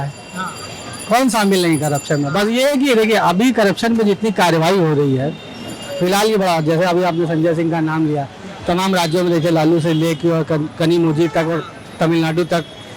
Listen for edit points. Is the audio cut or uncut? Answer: uncut